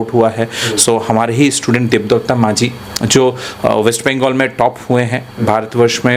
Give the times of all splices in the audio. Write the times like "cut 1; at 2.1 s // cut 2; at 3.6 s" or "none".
none